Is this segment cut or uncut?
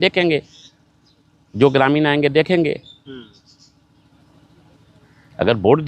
uncut